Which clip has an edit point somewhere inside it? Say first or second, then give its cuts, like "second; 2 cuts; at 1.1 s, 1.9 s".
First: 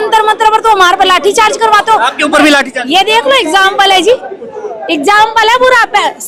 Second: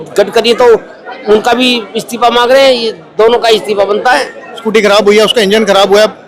second; 1 cut; at 4.6 s